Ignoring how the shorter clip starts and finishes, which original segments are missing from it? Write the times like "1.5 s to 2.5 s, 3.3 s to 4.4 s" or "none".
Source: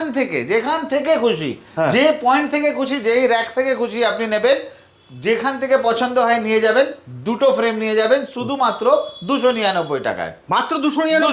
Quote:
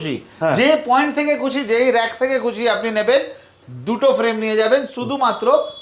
5.0 s to 7.1 s